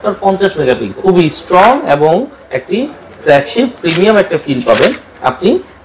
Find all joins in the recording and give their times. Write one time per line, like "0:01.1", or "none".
0:00.9